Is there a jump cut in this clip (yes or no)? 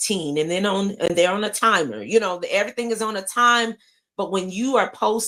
no